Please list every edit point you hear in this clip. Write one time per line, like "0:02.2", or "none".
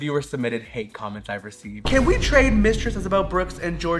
0:01.7